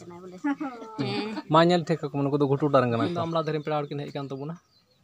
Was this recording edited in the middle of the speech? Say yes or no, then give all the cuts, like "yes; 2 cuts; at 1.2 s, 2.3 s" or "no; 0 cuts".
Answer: yes; 1 cut; at 3.2 s